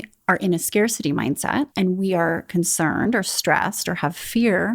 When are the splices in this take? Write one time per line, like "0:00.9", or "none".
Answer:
0:01.7